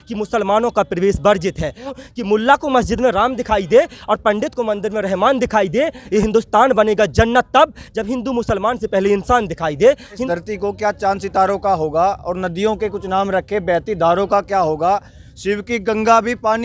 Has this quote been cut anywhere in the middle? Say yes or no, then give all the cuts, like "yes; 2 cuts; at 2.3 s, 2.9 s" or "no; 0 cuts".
yes; 2 cuts; at 1.9 s, 10.2 s